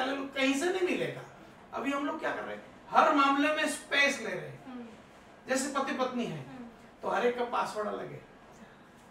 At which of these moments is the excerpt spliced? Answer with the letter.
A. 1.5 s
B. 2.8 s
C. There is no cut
A